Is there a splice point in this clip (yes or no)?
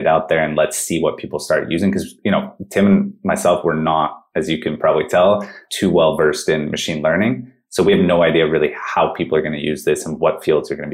no